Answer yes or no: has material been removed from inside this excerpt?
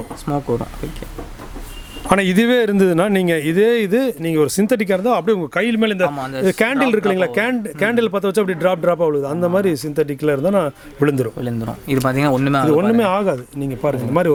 no